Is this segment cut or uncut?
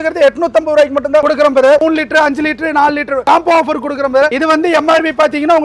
cut